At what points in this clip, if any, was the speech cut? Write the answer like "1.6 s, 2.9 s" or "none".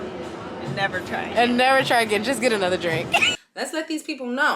3.3 s